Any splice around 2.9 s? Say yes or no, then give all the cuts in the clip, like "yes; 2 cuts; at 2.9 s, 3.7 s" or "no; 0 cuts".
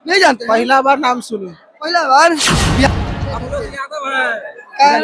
yes; 1 cut; at 2.9 s